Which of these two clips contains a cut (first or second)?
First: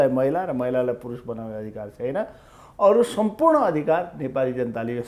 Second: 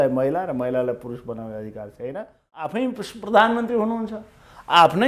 second